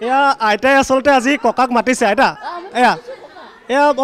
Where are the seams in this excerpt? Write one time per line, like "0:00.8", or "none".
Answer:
none

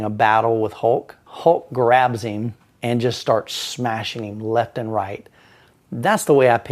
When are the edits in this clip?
0:01.2

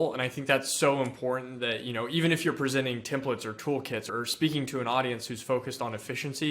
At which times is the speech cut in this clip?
0:04.1

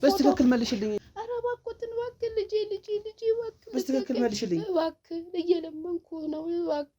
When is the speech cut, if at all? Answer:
0:01.0

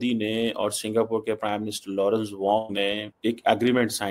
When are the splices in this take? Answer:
0:03.1

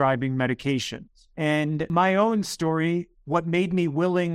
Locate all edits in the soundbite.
0:01.9

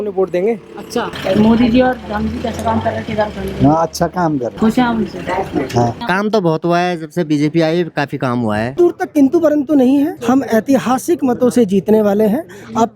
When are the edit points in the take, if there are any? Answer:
0:01.1
0:04.5
0:06.0
0:08.7
0:10.2

